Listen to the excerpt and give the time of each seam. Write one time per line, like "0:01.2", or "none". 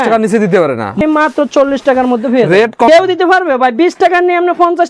0:01.0
0:02.9